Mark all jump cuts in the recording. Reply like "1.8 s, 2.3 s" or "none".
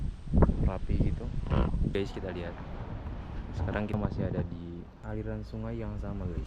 2.0 s, 3.9 s, 4.9 s